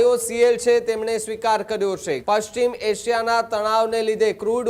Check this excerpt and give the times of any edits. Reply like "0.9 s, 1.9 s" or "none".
2.2 s